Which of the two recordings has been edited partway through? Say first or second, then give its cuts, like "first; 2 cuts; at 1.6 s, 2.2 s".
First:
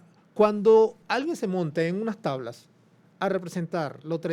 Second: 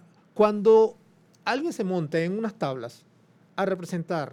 first; 1 cut; at 1.0 s